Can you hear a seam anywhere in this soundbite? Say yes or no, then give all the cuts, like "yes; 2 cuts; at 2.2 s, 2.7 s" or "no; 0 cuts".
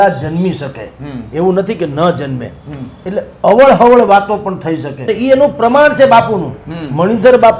yes; 1 cut; at 5.0 s